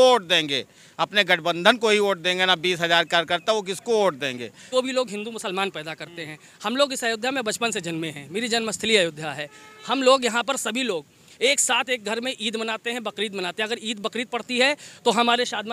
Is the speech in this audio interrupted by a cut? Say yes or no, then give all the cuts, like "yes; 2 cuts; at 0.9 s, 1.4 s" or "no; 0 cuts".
yes; 1 cut; at 4.7 s